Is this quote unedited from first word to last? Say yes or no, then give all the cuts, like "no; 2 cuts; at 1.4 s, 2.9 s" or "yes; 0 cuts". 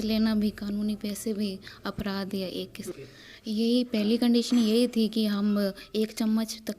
no; 1 cut; at 2.9 s